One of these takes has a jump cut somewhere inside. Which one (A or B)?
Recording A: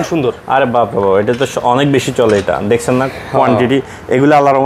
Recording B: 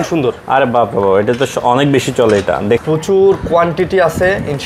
B